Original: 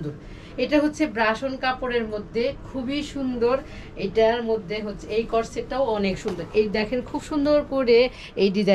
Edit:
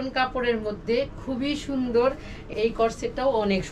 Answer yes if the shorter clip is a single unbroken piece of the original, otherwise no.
no